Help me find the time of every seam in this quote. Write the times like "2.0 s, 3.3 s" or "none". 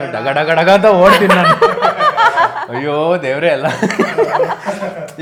none